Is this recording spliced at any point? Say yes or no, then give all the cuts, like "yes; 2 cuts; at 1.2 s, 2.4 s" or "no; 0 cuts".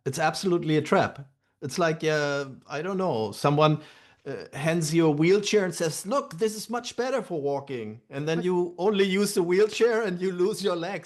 no; 0 cuts